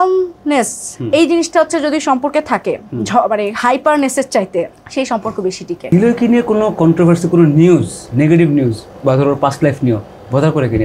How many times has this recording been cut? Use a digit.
2